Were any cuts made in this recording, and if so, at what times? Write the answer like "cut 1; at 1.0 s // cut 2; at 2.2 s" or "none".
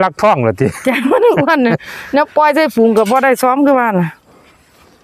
none

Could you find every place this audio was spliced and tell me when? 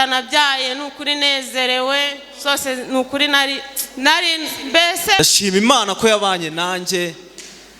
cut 1; at 5.2 s

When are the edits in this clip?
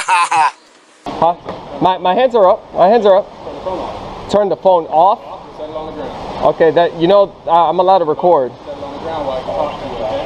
cut 1; at 1.1 s

